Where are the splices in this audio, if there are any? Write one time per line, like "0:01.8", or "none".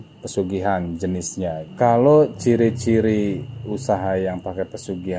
0:01.6